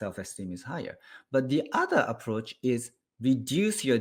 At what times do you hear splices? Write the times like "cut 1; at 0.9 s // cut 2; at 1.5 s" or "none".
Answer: none